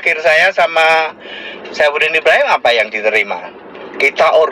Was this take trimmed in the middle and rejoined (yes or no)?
no